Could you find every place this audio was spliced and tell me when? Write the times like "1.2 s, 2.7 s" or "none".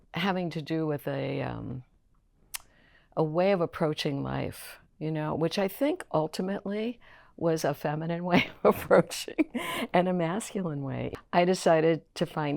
11.0 s